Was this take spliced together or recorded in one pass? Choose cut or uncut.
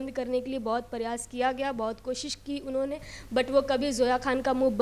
uncut